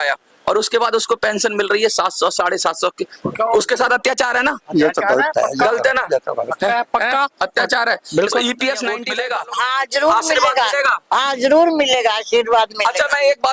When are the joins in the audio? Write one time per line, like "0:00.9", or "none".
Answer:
0:09.1